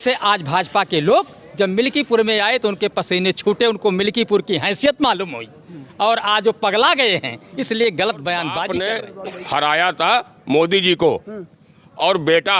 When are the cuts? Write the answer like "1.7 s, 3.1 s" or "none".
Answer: 8.6 s